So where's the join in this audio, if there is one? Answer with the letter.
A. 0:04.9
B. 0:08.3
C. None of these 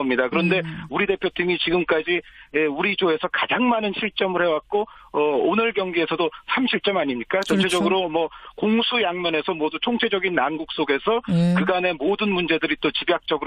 A